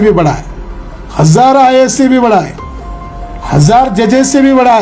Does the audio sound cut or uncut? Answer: uncut